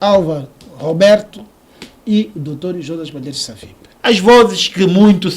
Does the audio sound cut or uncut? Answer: cut